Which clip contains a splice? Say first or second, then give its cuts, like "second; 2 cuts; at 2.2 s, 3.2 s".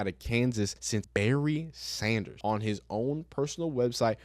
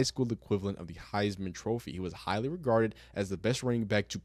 first; 2 cuts; at 0.9 s, 2.3 s